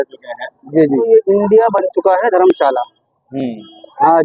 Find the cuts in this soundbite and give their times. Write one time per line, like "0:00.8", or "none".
0:01.1

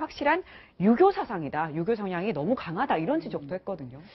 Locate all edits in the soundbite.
0:02.3

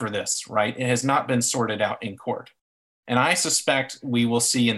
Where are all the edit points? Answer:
none

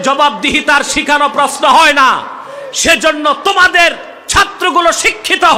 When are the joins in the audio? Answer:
none

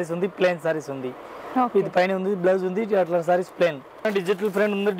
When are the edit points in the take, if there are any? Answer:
0:04.1

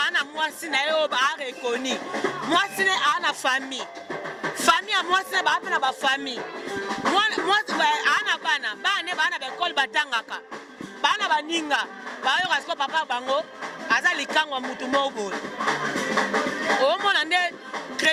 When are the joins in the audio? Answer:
none

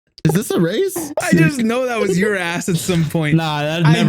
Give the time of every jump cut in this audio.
0:01.2

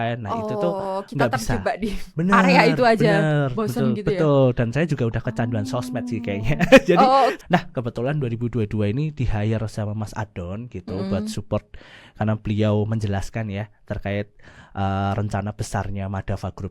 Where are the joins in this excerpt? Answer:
0:07.4

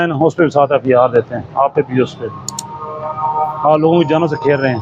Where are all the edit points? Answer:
none

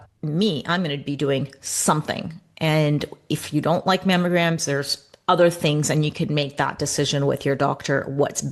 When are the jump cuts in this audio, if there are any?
none

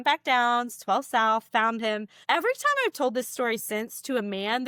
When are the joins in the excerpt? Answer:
none

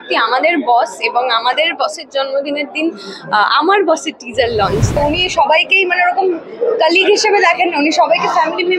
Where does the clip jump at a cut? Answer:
0:05.0

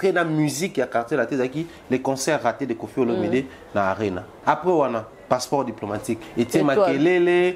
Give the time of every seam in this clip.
0:04.4
0:06.2

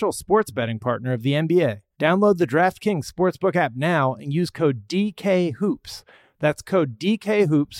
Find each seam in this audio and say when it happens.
0:01.9

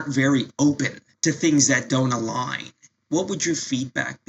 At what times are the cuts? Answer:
0:01.0

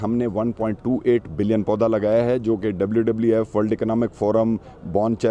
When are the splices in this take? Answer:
none

